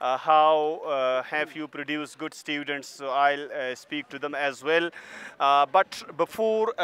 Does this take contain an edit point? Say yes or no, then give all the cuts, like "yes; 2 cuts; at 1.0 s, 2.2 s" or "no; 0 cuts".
no; 0 cuts